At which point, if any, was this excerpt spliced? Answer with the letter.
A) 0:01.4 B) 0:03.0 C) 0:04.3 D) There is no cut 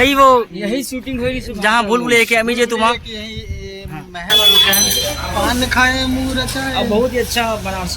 C